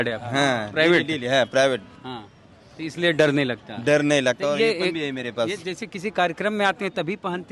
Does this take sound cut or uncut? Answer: uncut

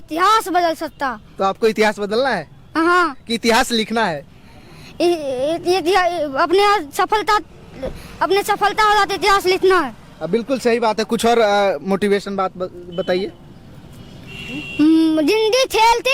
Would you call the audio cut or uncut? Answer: uncut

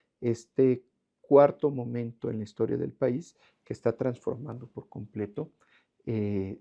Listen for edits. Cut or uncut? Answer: uncut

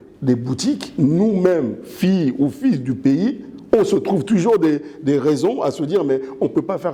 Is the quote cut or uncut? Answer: uncut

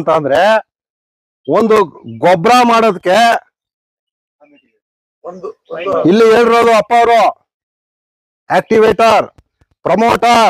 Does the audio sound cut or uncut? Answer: uncut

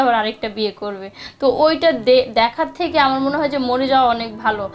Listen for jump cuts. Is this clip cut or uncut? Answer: uncut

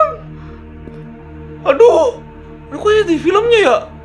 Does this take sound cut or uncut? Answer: uncut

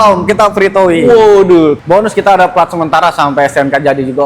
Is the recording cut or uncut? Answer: cut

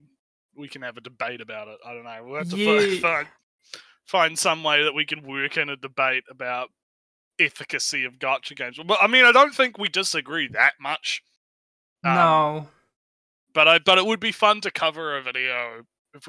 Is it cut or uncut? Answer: uncut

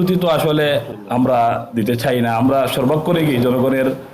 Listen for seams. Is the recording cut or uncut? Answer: cut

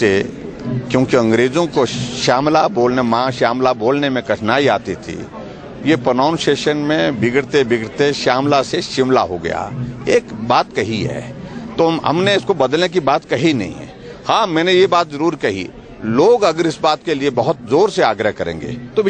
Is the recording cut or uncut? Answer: uncut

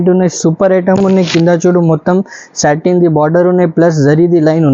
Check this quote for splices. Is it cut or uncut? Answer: uncut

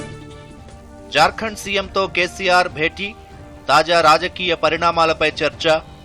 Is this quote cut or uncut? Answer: cut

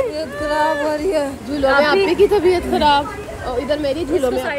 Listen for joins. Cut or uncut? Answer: uncut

